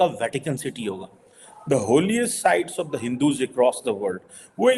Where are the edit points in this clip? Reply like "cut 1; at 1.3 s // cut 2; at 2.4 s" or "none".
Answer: none